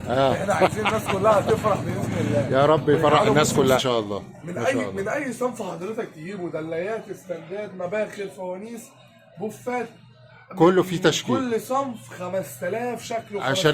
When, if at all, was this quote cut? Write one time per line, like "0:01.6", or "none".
0:03.8